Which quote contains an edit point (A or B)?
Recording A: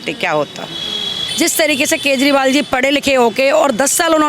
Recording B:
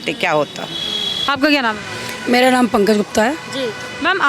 A